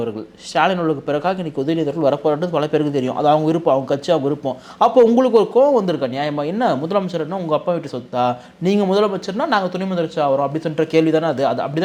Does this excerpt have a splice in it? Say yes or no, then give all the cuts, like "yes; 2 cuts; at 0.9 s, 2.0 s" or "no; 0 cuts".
no; 0 cuts